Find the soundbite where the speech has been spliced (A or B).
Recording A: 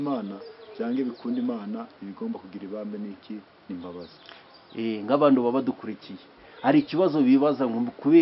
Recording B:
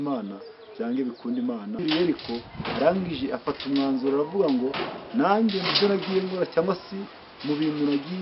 B